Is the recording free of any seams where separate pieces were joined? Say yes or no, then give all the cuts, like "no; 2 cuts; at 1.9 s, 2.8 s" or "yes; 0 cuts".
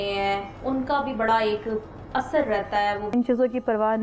no; 1 cut; at 3.1 s